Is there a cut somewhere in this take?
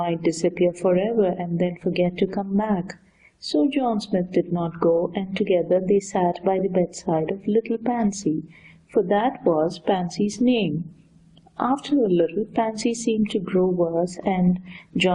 yes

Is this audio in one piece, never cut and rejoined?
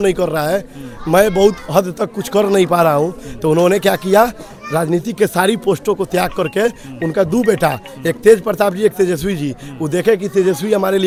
yes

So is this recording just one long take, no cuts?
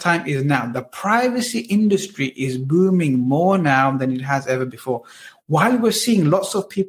yes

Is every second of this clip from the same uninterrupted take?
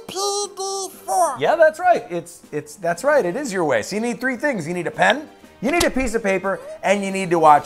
no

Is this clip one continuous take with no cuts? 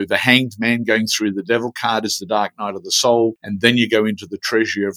no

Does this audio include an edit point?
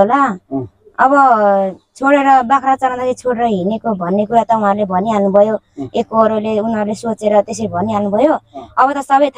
no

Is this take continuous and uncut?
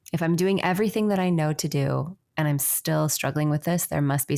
yes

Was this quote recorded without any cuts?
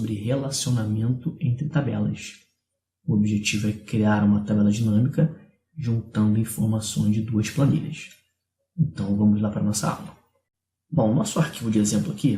yes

